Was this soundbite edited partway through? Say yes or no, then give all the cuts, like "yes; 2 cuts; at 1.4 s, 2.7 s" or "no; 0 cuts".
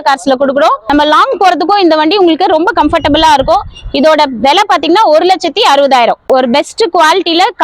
yes; 2 cuts; at 0.8 s, 6.2 s